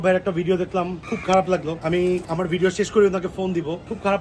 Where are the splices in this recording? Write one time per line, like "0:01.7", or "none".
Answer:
0:01.9